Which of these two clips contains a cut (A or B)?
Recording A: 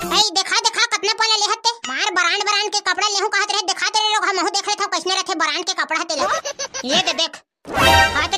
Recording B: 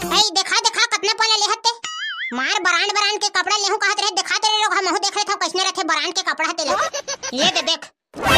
A